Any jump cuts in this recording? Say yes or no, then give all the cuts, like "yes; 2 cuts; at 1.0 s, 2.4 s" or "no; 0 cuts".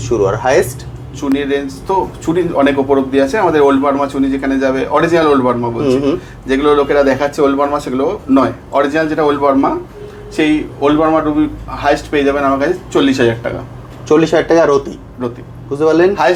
no; 0 cuts